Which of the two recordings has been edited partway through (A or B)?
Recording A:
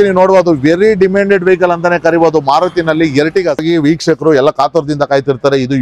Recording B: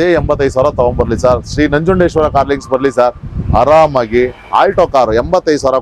A